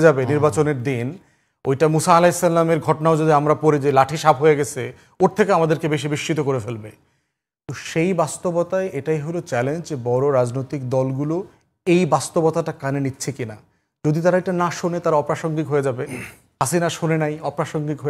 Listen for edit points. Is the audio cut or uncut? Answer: uncut